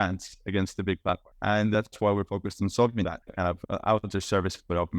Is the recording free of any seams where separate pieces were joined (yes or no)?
no